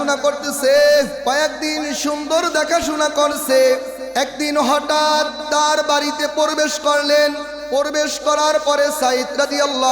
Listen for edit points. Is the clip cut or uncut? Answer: cut